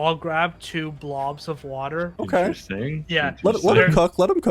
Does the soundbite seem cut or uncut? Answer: cut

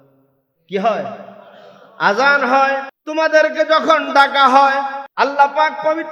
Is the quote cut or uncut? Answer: cut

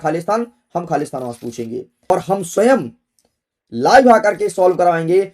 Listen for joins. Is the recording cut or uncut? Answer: cut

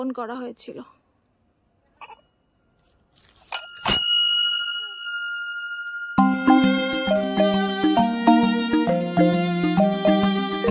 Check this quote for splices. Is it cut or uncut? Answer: uncut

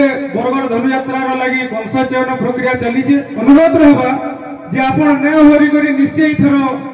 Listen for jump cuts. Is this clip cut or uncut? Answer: cut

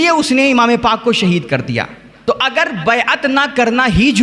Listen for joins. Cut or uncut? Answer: cut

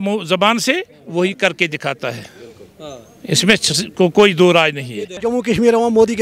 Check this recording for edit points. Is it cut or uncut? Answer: cut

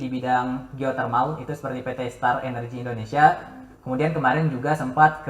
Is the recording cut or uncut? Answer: uncut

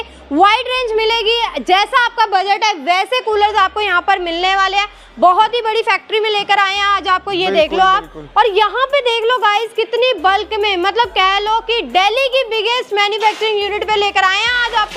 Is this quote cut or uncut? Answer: uncut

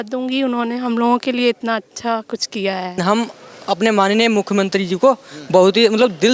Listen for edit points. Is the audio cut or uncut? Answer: cut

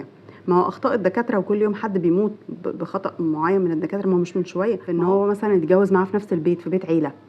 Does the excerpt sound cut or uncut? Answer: cut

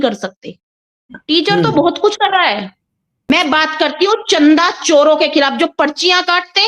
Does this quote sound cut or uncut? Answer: cut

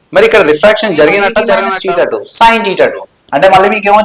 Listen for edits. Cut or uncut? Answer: cut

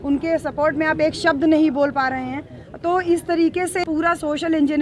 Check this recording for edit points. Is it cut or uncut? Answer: cut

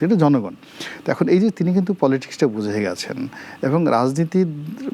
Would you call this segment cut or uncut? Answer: uncut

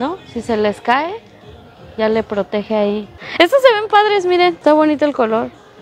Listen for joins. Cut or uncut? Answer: cut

